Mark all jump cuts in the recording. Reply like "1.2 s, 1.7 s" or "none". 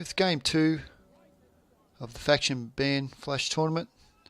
none